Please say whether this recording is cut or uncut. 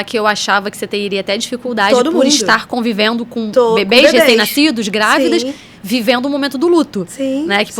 uncut